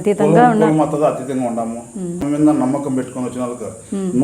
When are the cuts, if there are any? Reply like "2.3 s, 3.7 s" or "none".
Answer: 2.2 s